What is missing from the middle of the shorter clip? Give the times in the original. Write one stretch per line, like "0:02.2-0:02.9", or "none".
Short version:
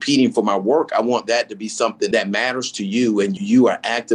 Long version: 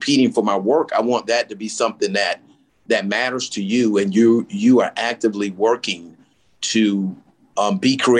0:02.1-0:02.9
0:04.1-0:04.5